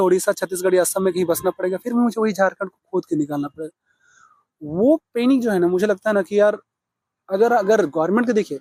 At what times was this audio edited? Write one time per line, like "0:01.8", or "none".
none

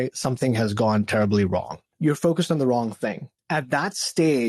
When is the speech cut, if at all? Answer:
0:01.8
0:03.3

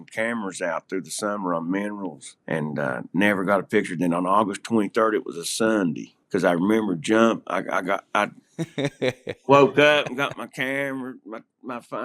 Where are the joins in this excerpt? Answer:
0:02.3
0:06.1

